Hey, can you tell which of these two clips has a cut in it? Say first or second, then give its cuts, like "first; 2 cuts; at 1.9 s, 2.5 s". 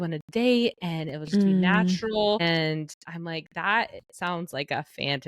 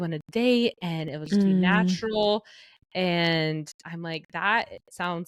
first; 1 cut; at 2.4 s